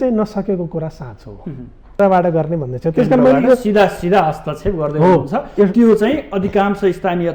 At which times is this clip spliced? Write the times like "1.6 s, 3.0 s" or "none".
2.0 s